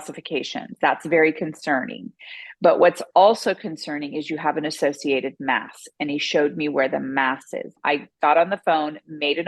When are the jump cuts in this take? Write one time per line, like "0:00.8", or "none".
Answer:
0:07.7